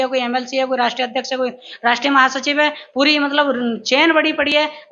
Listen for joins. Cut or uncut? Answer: uncut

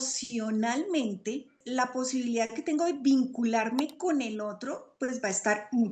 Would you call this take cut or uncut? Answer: cut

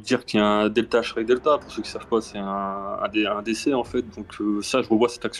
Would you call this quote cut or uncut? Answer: uncut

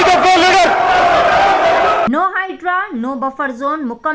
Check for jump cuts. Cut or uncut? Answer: cut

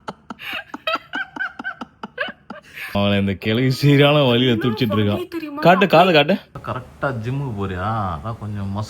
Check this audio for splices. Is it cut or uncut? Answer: cut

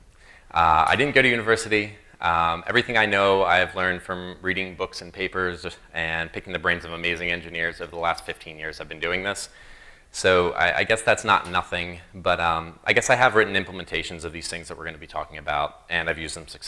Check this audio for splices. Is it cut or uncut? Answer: cut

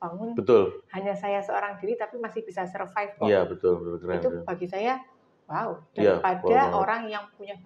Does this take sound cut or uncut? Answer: uncut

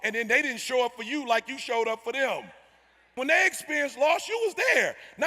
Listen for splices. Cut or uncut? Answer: cut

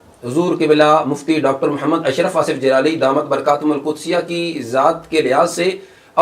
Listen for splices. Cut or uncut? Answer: uncut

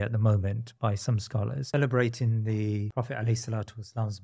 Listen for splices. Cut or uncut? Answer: cut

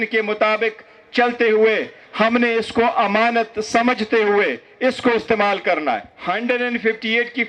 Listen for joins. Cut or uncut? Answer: cut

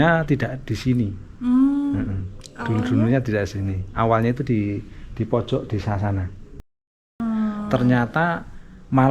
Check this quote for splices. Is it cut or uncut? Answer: cut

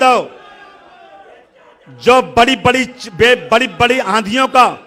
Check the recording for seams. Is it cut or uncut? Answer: uncut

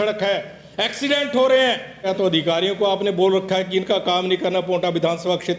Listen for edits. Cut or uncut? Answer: cut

